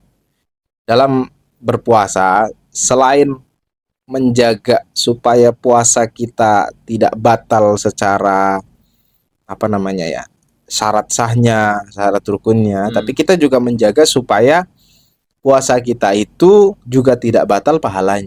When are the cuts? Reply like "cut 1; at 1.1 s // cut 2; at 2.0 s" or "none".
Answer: none